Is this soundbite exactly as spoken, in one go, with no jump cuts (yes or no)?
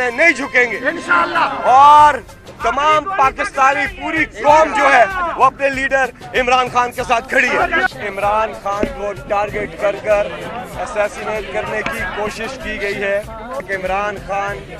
no